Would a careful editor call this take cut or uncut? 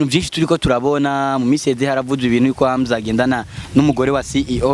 uncut